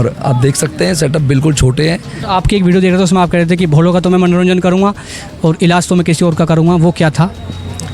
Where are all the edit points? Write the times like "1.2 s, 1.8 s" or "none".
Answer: 2.1 s